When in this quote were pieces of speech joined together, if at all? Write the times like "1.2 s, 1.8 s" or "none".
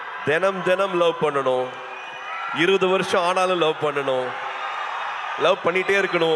none